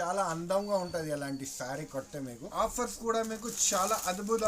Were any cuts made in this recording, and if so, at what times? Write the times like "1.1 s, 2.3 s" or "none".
2.5 s